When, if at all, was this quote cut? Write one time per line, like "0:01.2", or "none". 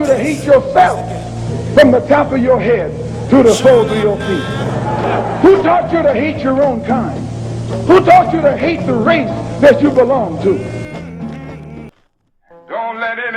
0:11.9

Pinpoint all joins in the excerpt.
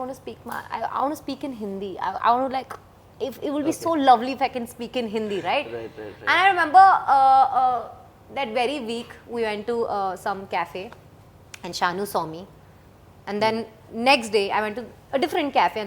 none

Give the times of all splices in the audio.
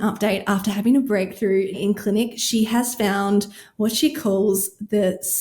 0:01.8

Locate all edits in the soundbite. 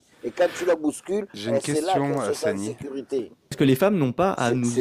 0:03.6

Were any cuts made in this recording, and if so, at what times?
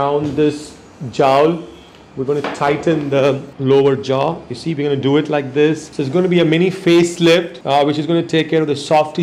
0:03.5
0:05.9
0:07.6

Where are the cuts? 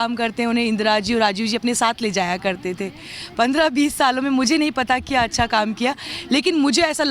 none

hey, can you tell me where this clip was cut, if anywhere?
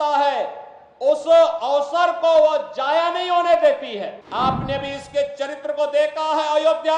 0:04.2

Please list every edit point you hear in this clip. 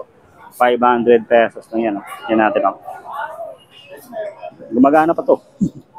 none

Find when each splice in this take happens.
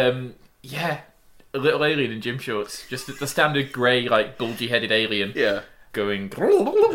0:05.8

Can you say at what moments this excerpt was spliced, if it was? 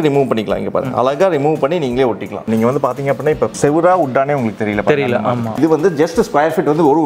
0:02.5
0:03.5
0:05.6

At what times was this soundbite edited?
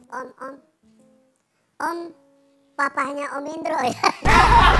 none

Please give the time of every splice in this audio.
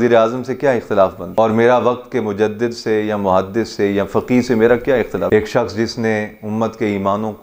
0:01.2

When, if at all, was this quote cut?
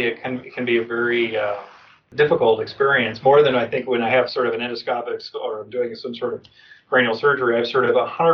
0:02.1

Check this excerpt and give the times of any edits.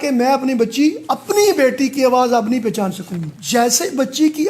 0:03.3

